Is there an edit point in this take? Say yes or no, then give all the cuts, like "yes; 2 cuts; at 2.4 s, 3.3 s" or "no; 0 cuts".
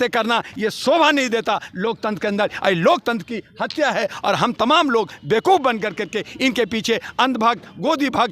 no; 0 cuts